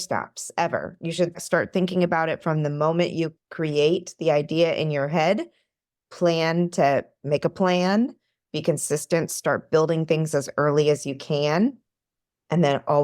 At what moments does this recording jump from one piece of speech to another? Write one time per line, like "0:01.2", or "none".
0:01.4
0:03.4